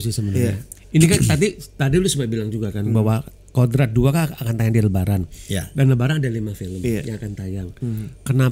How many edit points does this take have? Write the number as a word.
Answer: zero